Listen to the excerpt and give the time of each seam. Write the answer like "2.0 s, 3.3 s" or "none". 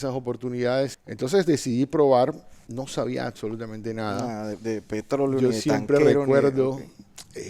1.0 s

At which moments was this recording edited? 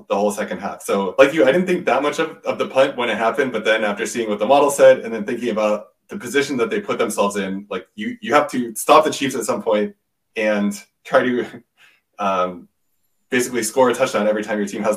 1.1 s

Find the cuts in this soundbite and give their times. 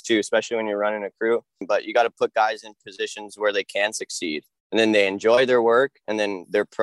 1.6 s

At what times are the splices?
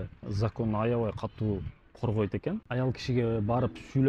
none

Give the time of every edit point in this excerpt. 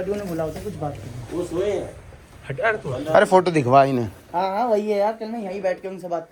none

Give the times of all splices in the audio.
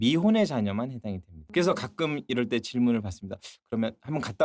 1.4 s

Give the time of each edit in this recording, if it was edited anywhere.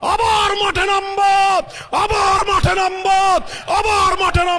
none

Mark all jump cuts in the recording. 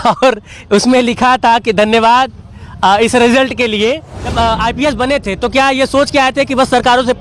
4.3 s

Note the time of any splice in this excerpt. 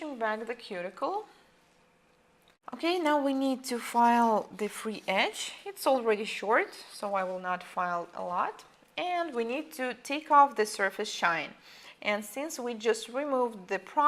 4.1 s

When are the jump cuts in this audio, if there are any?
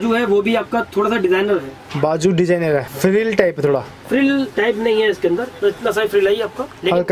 none

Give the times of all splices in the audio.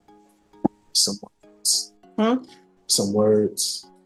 none

